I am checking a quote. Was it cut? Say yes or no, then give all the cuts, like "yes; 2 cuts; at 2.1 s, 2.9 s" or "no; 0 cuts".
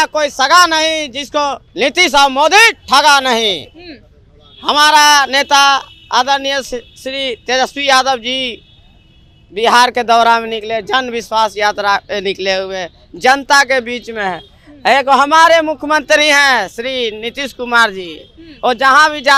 no; 0 cuts